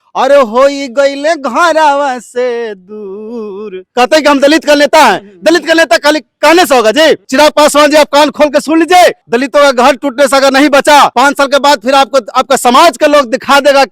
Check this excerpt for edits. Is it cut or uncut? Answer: cut